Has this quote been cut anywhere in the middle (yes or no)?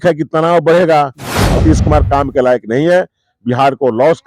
yes